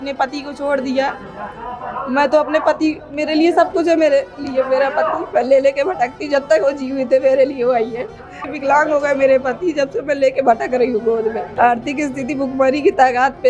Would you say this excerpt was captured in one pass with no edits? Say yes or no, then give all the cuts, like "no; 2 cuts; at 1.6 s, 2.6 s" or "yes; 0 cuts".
no; 2 cuts; at 8.4 s, 11.5 s